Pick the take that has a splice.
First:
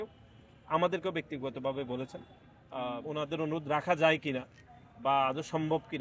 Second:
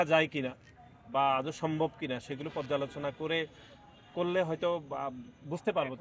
first; 1 cut; at 2.6 s

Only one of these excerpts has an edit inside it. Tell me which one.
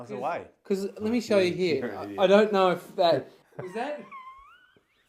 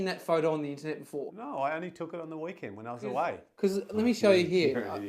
second; 1 cut; at 1.3 s

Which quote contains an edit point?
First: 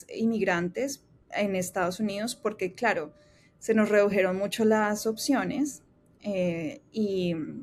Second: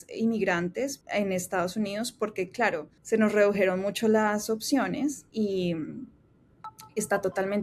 second; 3 cuts; at 1.0 s, 2.9 s, 5.2 s

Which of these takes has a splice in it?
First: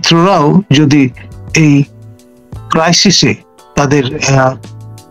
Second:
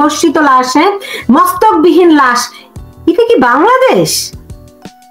second; 1 cut; at 4.2 s

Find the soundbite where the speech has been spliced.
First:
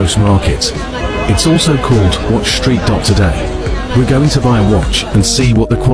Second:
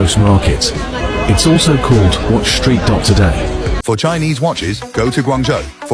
second; 1 cut; at 3.8 s

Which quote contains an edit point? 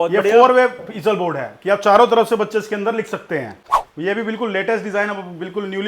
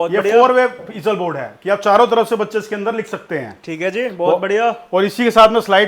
first; 1 cut; at 3.6 s

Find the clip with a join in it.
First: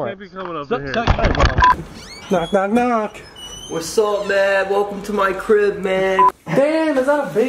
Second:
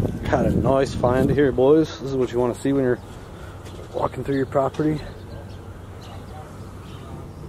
first; 2 cuts; at 1.7 s, 6.4 s

